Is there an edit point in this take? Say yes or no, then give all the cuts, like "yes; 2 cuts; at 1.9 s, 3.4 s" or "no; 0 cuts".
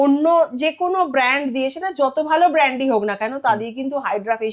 no; 0 cuts